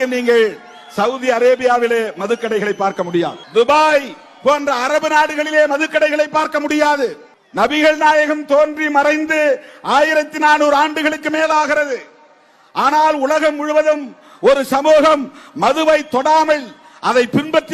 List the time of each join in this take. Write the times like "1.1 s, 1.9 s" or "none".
none

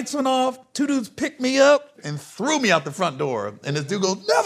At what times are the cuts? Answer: 1.9 s

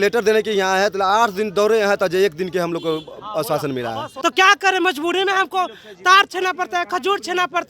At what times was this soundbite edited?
4.1 s

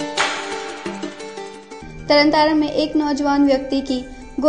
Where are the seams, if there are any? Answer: 1.8 s

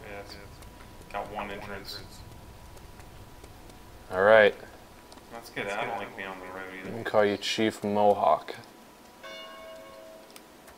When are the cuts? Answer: none

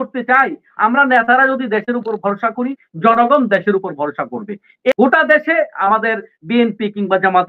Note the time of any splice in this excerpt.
4.9 s

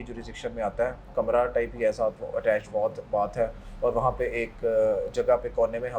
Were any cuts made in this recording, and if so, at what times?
1.0 s

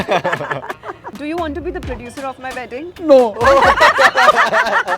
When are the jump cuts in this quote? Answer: 1.1 s

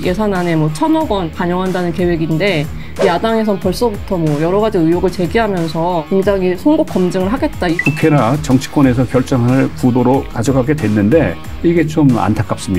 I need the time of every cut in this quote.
6.0 s, 7.8 s, 10.3 s, 11.4 s

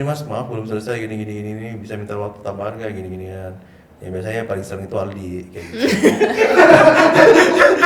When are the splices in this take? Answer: none

